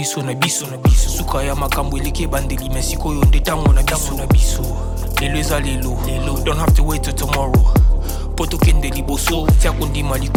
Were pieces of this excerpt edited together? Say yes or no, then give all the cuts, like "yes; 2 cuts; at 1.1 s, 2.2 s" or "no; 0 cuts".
no; 0 cuts